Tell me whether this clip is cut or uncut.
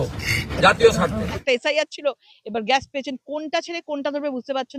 cut